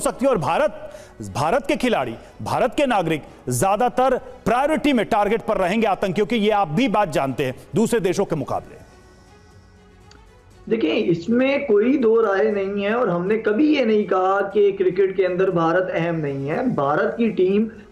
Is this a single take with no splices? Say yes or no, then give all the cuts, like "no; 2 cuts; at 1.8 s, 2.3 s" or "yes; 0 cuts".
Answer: yes; 0 cuts